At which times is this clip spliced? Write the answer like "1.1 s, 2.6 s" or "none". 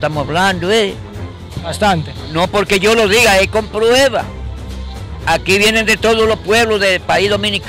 none